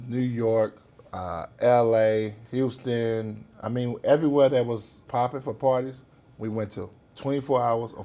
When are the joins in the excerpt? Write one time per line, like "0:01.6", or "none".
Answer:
0:02.4
0:05.0
0:07.0